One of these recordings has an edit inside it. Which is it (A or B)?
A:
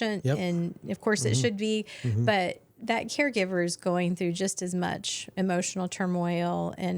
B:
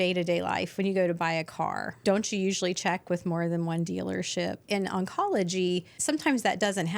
B